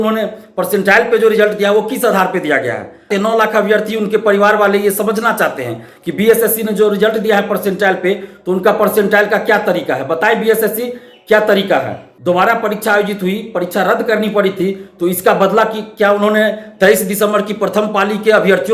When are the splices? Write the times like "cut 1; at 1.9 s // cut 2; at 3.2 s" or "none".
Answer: cut 1; at 3.1 s // cut 2; at 12.0 s